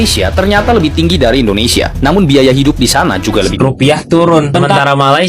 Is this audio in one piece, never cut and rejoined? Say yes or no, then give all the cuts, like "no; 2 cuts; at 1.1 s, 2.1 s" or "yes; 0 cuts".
no; 1 cut; at 3.5 s